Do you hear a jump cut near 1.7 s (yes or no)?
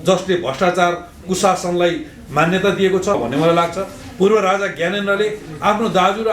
no